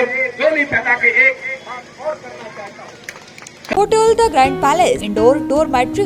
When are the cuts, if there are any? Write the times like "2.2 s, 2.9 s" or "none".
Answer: 3.7 s, 5.1 s